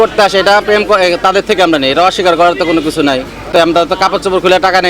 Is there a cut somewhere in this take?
yes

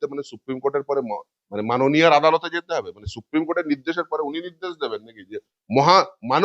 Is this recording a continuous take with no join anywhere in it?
no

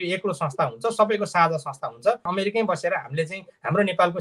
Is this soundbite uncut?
no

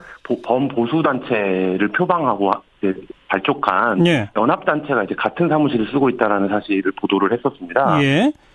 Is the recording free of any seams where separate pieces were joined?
yes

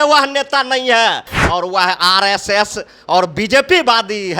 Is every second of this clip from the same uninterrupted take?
no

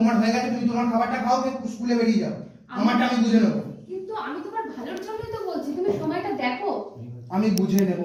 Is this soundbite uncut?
yes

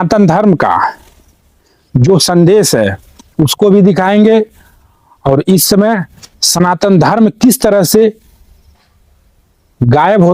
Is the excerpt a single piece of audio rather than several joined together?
yes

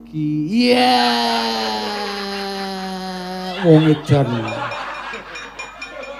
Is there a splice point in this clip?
no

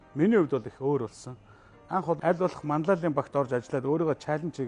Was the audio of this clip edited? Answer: yes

